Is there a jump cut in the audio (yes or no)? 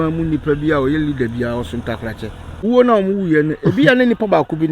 yes